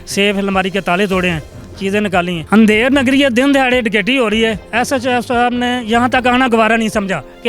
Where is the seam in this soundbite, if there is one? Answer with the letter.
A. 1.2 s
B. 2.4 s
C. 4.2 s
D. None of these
B